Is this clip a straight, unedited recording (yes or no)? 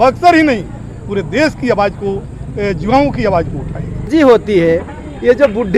no